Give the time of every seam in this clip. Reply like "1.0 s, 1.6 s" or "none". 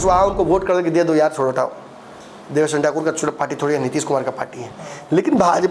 none